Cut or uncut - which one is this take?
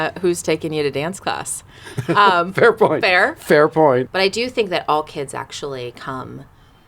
cut